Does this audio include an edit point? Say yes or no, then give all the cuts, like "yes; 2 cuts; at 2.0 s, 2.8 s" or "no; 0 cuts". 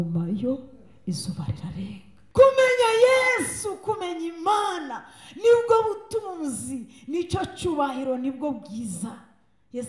yes; 1 cut; at 2.1 s